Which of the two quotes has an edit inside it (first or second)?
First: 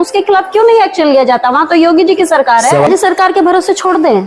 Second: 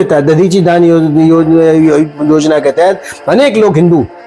first